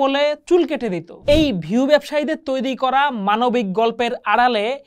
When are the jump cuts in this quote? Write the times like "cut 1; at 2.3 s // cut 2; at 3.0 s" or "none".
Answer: cut 1; at 1.1 s